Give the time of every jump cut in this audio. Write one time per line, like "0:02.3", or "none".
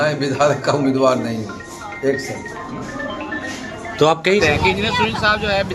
0:04.4